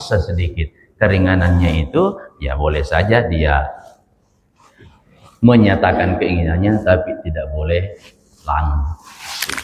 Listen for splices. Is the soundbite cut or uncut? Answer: uncut